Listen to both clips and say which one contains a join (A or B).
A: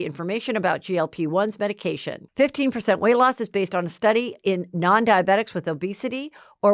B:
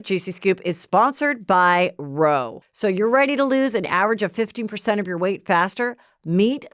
B